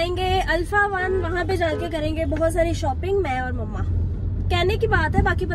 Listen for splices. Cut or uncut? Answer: uncut